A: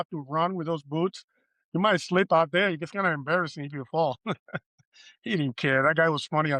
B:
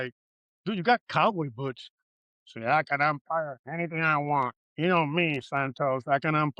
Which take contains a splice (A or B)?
B